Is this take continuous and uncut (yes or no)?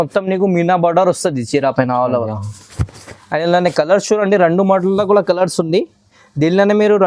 yes